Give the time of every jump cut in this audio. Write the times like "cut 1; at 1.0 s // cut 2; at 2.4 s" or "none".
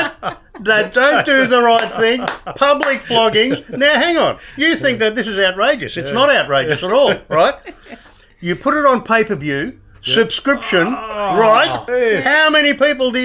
cut 1; at 11.9 s

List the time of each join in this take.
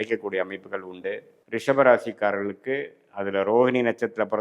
cut 1; at 1.3 s

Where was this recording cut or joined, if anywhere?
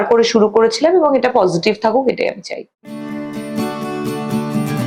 cut 1; at 3.1 s

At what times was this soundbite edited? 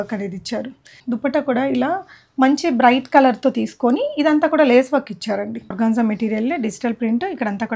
cut 1; at 1.0 s // cut 2; at 5.7 s

